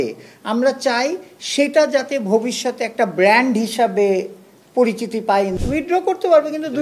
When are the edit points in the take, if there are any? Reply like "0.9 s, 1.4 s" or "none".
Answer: 5.6 s